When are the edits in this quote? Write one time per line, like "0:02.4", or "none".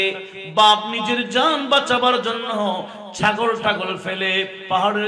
none